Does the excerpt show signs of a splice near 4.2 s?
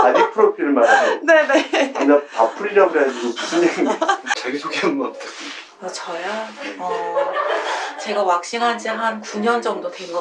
yes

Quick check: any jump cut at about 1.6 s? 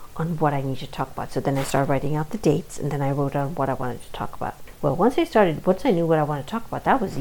no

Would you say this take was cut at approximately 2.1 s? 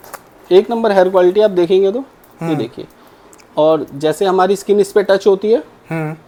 no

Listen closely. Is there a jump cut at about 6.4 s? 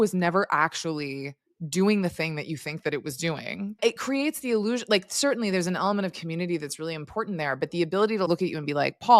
no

